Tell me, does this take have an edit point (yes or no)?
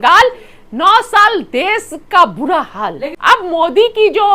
yes